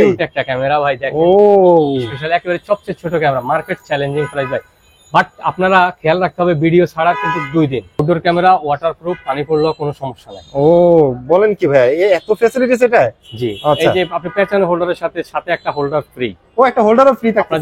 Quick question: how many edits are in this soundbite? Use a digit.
1